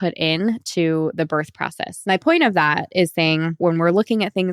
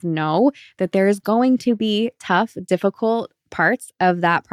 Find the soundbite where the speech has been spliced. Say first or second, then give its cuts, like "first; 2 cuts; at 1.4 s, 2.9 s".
first; 2 cuts; at 1.9 s, 3.6 s